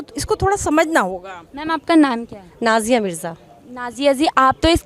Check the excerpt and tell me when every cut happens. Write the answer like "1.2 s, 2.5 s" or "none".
1.3 s